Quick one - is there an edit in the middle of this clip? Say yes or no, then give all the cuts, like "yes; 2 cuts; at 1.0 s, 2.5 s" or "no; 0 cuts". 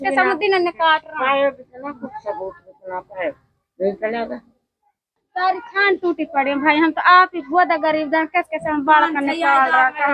yes; 1 cut; at 5.2 s